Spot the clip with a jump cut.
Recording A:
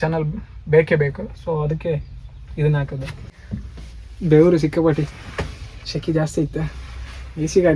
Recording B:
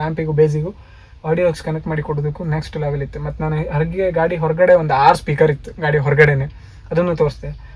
A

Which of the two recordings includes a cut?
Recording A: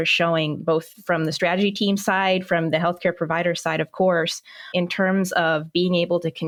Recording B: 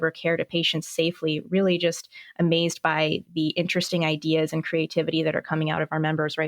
B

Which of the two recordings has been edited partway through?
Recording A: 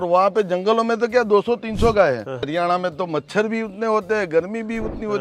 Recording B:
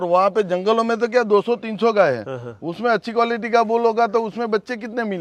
A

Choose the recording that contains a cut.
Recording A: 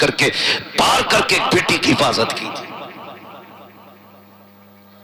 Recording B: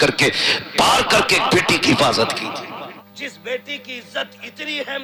B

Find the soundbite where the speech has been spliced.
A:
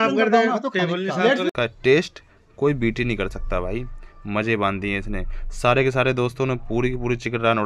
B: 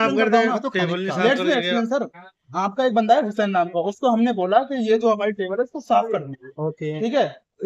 A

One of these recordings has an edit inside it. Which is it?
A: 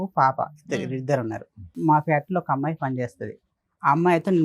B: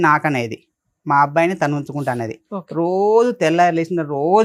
A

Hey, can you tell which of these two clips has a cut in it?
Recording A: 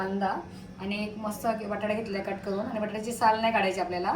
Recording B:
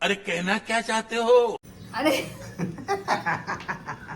B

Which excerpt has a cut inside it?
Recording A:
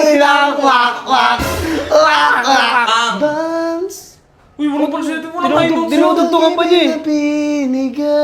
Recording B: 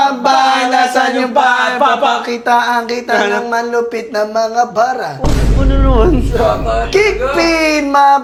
A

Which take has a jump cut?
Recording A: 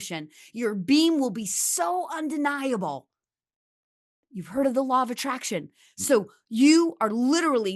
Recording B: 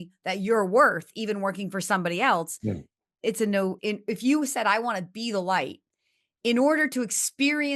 B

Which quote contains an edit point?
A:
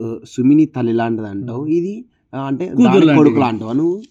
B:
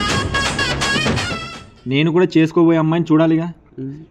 B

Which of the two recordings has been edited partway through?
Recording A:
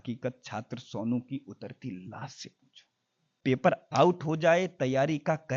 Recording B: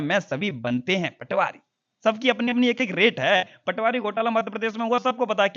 A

